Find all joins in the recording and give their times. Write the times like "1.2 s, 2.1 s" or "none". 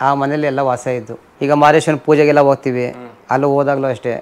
1.2 s